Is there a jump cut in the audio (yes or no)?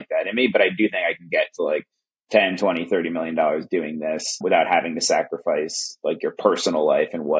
no